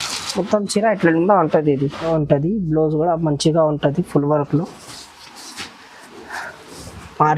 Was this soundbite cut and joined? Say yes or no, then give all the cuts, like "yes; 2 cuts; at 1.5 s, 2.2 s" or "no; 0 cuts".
yes; 1 cut; at 2.1 s